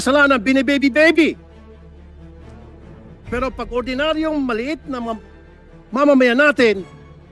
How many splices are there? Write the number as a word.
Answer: two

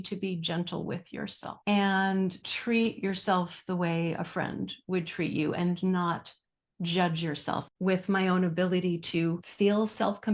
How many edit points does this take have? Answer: four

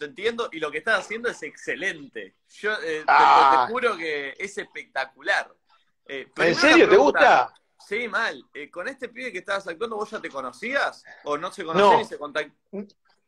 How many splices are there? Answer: one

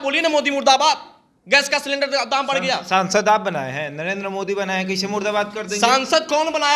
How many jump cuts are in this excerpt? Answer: zero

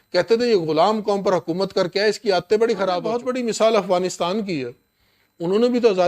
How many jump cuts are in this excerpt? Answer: one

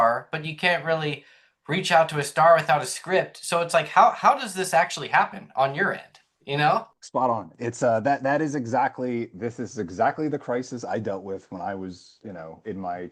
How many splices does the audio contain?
one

